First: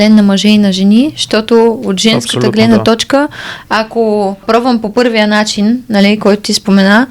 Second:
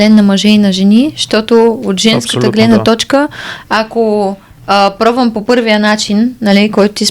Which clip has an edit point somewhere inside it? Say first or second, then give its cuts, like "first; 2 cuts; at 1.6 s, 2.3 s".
first; 1 cut; at 4.4 s